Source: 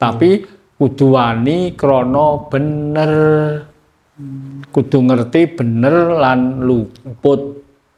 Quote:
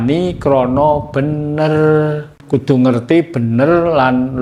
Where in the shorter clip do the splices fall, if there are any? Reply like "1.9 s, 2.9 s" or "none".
2.3 s